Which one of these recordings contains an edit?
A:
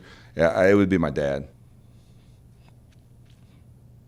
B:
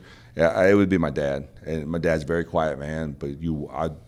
A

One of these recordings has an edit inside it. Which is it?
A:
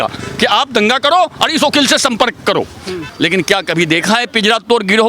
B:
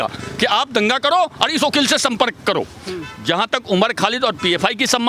A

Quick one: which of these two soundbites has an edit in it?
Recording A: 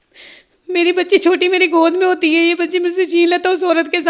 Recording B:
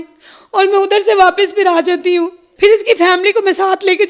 B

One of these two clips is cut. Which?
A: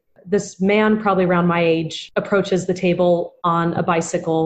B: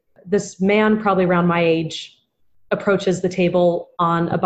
A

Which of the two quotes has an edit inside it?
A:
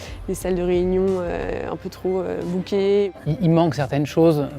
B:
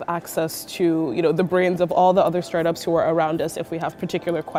A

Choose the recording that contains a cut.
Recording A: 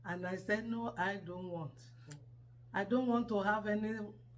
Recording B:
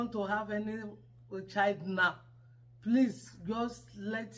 A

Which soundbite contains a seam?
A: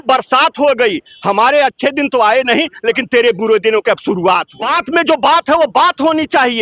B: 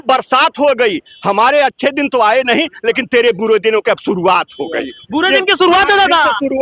A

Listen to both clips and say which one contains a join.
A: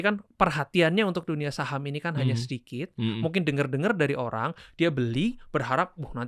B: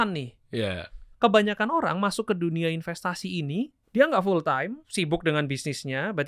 B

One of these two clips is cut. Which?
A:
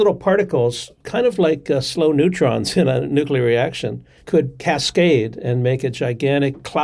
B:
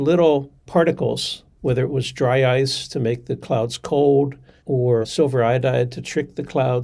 B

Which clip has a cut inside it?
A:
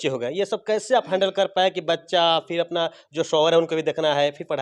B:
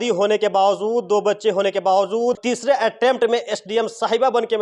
B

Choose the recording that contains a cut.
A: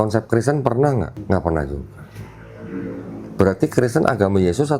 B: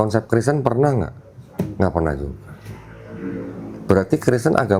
A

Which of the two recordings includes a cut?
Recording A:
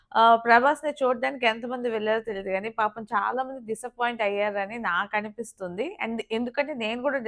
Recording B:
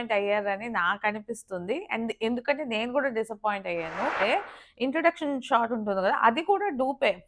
B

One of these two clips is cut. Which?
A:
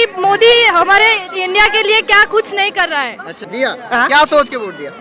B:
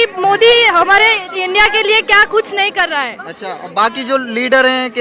A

